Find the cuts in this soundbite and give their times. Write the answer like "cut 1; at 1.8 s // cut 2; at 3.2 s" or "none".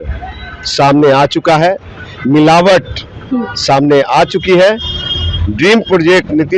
none

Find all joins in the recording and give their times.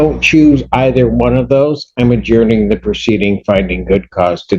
none

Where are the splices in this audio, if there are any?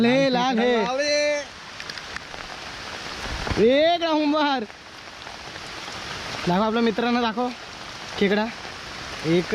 cut 1; at 2.3 s

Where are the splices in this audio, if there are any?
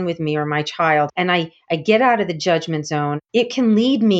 cut 1; at 1.1 s // cut 2; at 3.2 s

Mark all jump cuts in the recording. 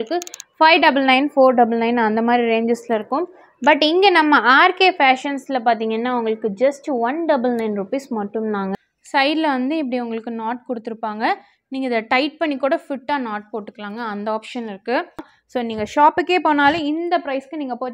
cut 1; at 8.7 s // cut 2; at 15.4 s

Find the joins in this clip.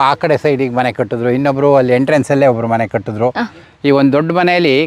none

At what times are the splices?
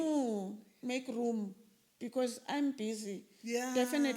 none

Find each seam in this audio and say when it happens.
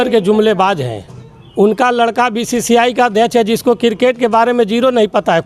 none

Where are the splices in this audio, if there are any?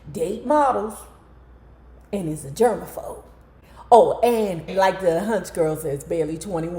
cut 1; at 4.7 s

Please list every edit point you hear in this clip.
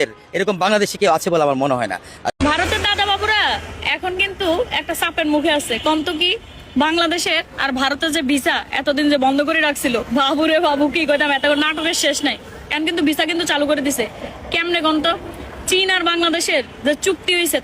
cut 1; at 2.2 s

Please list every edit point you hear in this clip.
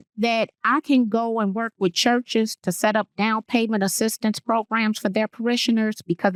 none

